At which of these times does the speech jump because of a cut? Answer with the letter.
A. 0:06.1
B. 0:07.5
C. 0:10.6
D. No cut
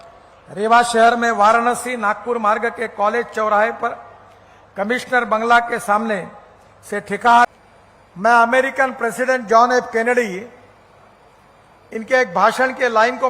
B